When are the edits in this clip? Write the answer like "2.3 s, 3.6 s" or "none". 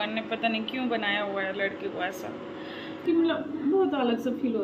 3.0 s